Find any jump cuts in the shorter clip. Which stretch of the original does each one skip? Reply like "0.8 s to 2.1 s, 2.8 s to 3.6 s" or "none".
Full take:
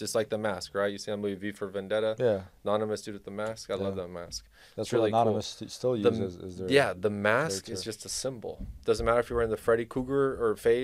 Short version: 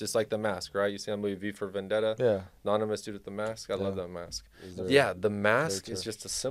4.7 s to 6.5 s